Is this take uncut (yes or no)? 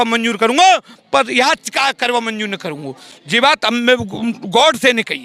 yes